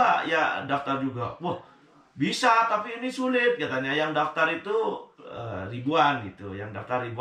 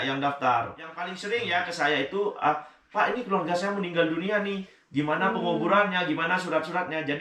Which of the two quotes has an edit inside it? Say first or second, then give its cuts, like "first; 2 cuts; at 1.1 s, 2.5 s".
second; 1 cut; at 1.2 s